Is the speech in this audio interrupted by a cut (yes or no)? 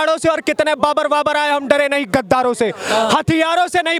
no